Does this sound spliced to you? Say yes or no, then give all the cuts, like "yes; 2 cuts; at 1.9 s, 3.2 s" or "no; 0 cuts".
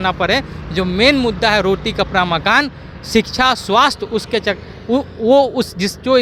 no; 0 cuts